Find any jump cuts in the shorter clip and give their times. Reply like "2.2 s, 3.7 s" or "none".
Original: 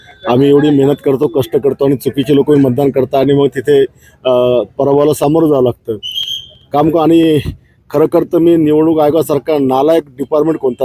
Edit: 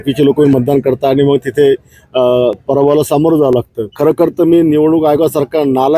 3.8 s